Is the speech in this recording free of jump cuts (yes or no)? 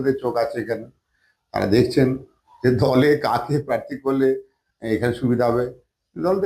yes